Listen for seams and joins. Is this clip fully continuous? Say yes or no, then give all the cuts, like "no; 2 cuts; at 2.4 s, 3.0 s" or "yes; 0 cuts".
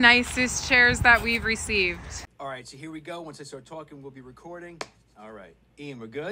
no; 1 cut; at 2.2 s